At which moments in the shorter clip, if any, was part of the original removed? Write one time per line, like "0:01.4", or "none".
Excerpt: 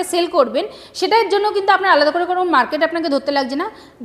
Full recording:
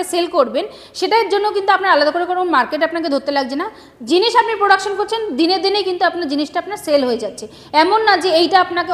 none